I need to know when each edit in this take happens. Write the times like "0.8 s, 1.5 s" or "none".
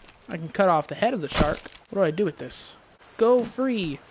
1.7 s

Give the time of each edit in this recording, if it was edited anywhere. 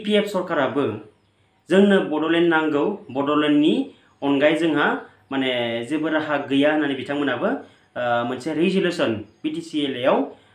none

